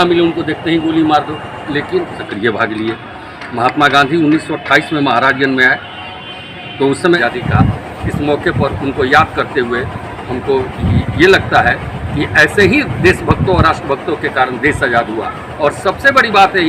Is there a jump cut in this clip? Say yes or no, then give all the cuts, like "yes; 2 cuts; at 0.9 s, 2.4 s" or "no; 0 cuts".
yes; 2 cuts; at 2.2 s, 7.2 s